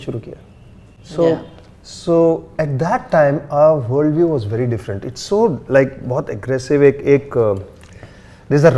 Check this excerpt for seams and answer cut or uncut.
uncut